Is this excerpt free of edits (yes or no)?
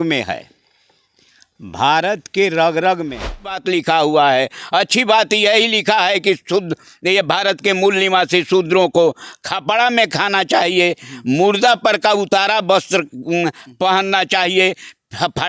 no